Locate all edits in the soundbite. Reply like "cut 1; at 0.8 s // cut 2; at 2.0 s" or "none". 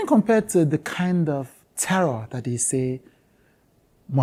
none